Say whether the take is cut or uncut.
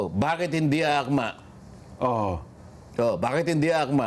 uncut